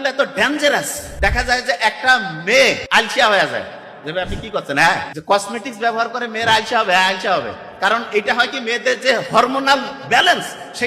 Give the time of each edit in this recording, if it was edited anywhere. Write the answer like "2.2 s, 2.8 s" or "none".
1.0 s, 2.8 s, 5.1 s